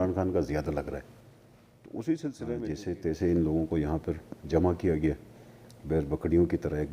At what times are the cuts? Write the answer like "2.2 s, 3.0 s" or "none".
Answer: 2.7 s